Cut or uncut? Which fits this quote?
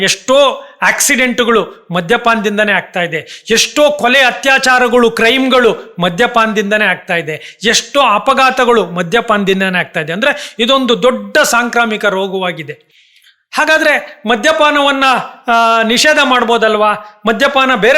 uncut